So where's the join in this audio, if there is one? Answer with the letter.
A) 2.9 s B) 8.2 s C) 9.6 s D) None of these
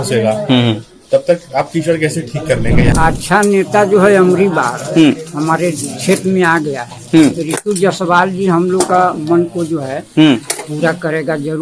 A